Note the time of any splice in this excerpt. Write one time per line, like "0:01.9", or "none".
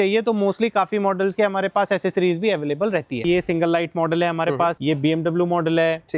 0:03.2

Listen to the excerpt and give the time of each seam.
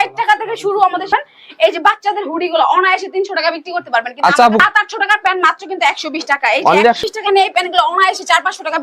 0:01.1
0:04.6
0:07.0

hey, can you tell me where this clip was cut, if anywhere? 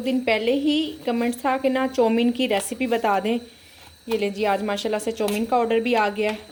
none

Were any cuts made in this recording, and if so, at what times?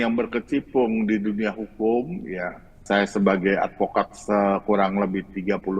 0:02.8

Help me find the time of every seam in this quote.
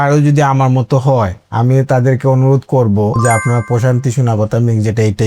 none

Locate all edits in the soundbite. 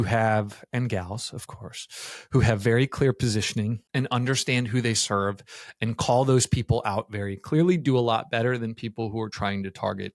0:03.8

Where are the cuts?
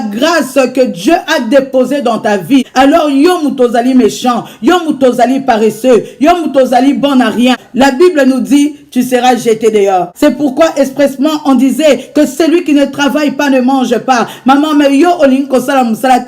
0:02.7
0:07.6
0:10.1

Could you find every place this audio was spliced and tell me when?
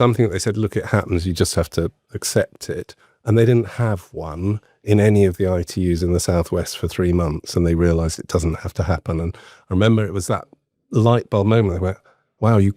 none

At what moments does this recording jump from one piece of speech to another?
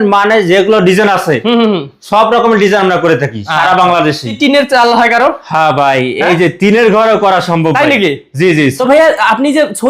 0:04.3
0:08.9

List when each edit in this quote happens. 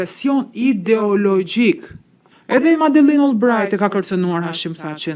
0:02.3

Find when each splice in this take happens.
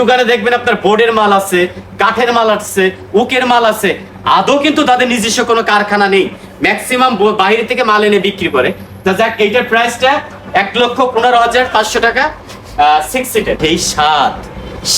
0:13.6

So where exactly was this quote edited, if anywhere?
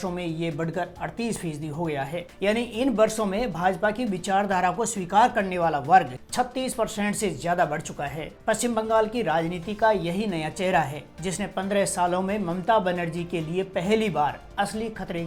none

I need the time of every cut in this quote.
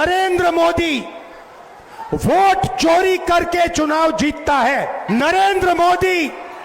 0:05.0

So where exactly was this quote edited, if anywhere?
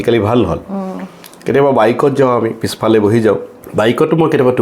0:03.6

